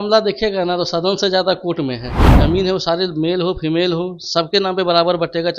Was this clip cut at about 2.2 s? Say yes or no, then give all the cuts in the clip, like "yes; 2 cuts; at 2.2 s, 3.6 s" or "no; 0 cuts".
yes; 1 cut; at 2.2 s